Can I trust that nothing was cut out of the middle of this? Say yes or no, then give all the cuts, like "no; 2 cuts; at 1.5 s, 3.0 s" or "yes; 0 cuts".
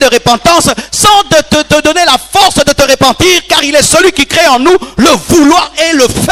yes; 0 cuts